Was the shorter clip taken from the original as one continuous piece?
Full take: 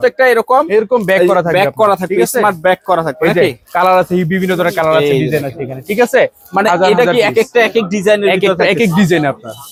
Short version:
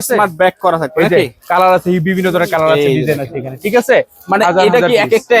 yes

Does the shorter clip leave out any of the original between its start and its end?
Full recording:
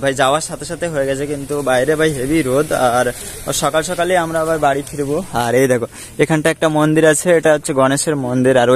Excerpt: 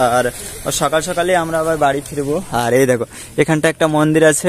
no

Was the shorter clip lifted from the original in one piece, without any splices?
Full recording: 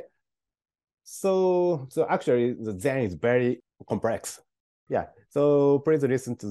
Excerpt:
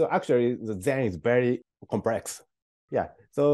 yes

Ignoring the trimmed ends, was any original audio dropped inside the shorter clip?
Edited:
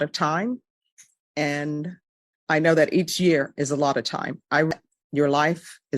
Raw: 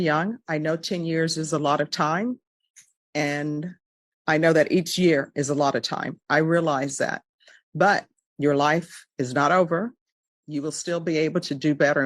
yes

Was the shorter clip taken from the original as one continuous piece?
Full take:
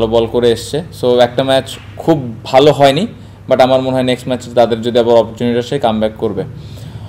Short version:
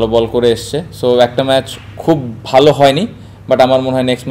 yes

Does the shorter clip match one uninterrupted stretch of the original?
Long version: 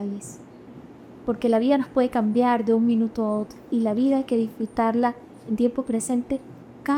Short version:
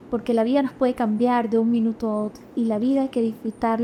yes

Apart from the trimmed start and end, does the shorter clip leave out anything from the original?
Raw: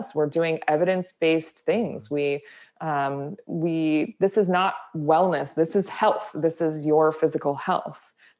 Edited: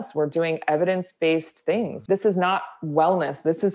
yes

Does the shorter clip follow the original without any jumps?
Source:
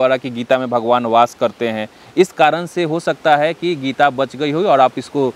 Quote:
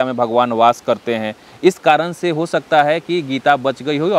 yes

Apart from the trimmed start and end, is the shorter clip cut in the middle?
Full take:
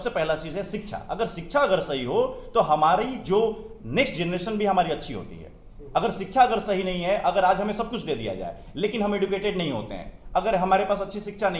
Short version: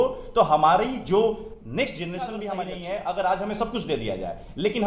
yes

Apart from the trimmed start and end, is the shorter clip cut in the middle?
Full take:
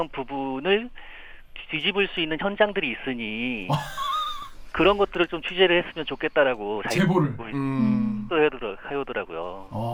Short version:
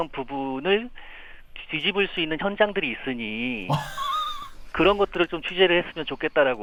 no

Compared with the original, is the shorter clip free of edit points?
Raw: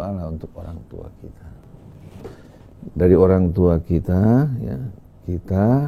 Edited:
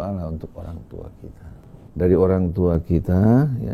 no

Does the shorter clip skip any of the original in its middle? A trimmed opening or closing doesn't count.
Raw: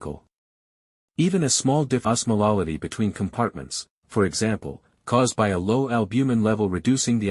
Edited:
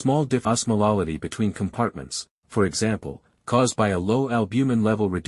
no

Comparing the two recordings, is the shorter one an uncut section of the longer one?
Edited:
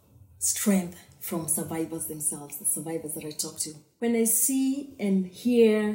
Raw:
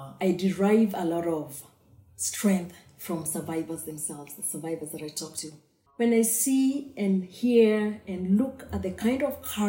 no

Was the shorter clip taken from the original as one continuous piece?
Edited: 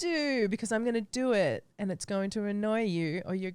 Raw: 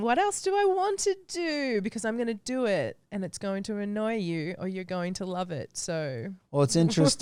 yes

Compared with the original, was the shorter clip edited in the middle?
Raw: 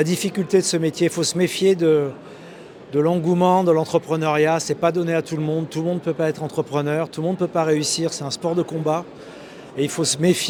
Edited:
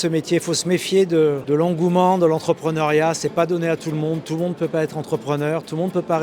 yes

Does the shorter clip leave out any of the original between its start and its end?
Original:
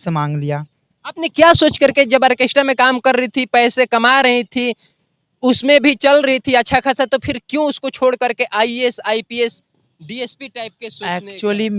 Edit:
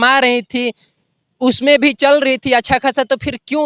no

